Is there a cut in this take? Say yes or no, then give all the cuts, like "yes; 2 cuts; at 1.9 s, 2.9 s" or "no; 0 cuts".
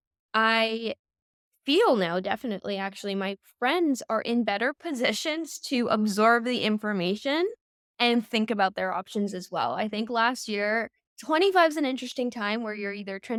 no; 0 cuts